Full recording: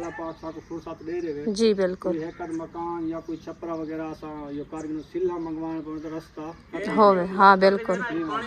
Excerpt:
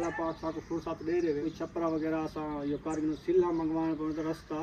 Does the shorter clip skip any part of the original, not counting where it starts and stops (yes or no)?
yes